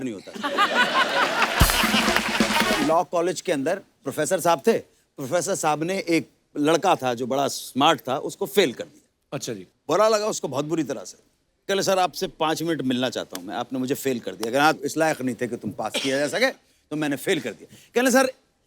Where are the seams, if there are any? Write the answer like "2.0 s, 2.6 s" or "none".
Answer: 2.8 s